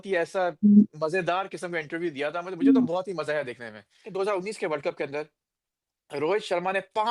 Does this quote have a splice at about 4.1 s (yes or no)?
yes